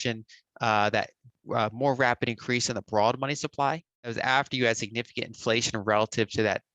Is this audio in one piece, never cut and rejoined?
no; 1 cut; at 3.9 s

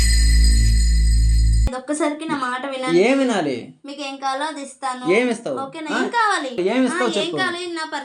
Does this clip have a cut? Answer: no; 0 cuts

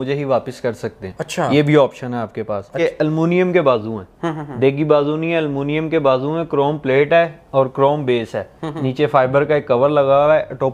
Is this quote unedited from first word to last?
no; 1 cut; at 2.8 s

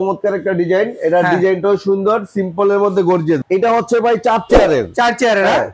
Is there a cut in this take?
yes; 1 cut; at 3.4 s

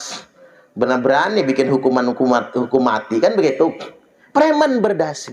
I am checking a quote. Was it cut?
no; 0 cuts

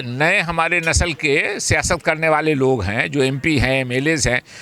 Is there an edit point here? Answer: no; 0 cuts

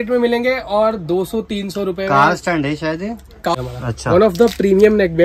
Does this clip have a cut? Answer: yes; 1 cut; at 3.5 s

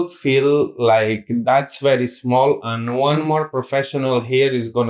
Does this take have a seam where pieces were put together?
no; 0 cuts

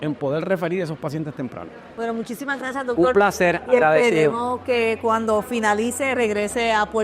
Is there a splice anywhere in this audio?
no; 0 cuts

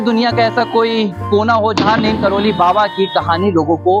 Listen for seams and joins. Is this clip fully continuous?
yes; 0 cuts

